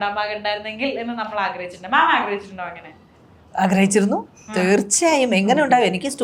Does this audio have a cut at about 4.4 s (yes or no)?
no